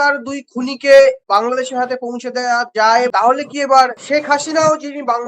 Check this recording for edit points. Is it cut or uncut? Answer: cut